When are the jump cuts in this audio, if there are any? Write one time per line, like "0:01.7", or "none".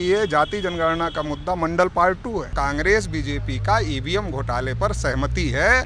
0:02.5